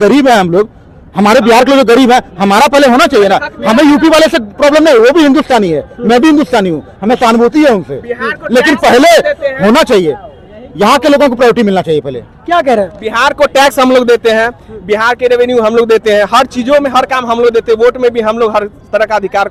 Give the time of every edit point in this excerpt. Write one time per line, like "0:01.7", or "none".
none